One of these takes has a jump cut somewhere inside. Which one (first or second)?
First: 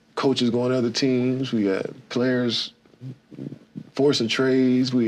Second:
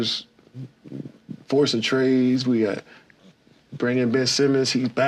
first